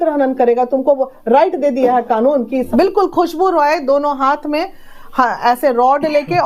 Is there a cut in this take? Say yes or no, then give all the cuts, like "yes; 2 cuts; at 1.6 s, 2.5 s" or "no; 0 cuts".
yes; 1 cut; at 2.7 s